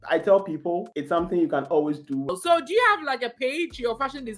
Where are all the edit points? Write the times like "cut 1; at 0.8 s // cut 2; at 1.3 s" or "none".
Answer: cut 1; at 2.3 s